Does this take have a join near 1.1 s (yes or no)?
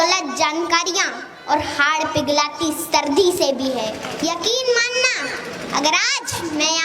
no